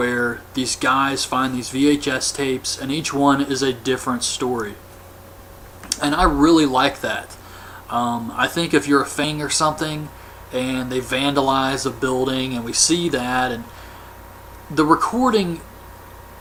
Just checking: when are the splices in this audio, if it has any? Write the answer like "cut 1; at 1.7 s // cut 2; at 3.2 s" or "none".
none